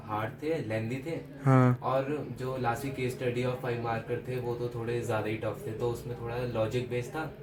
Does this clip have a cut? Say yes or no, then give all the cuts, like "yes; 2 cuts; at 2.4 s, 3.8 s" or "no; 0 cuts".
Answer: no; 0 cuts